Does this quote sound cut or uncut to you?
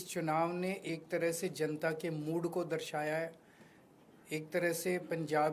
uncut